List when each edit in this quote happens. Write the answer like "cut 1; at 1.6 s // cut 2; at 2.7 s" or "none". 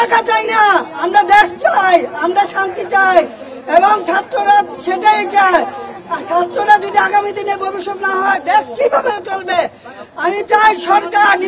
none